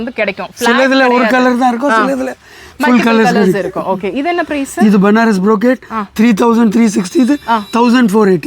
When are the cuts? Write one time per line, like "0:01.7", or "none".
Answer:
none